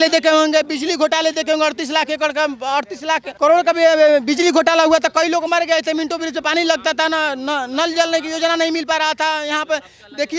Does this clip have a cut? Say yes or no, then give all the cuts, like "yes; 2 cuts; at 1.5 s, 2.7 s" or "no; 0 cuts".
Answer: yes; 1 cut; at 3.3 s